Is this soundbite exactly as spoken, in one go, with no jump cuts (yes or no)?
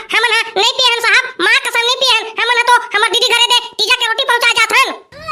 yes